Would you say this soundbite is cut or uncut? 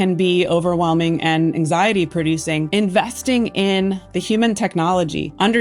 cut